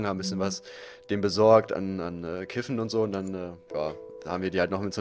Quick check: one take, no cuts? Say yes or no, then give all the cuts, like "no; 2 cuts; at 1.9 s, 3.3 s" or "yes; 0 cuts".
yes; 0 cuts